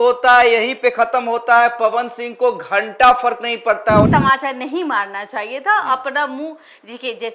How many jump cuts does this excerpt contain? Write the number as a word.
one